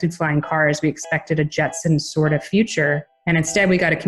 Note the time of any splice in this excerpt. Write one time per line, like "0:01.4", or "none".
0:03.1